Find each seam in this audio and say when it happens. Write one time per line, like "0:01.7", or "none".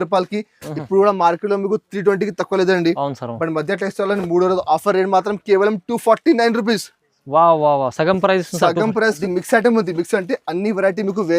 0:09.2

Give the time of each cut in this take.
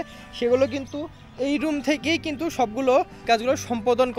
0:03.2

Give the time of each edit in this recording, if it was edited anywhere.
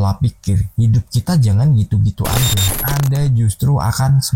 0:02.7

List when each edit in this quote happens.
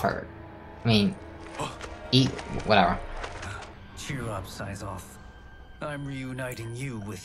0:03.8

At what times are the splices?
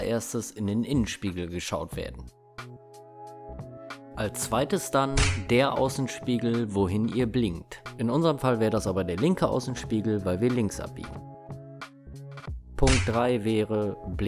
none

